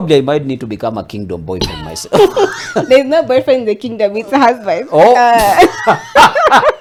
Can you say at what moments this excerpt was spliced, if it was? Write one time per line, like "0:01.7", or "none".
none